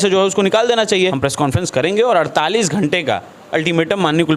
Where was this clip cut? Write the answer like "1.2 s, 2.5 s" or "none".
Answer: 1.2 s